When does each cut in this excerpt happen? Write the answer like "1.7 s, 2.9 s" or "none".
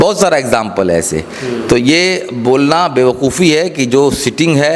none